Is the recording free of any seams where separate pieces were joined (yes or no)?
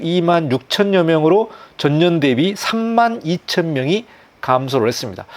yes